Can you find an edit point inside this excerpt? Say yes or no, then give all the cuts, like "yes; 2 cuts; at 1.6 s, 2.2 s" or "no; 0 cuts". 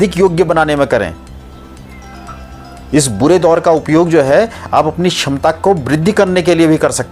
no; 0 cuts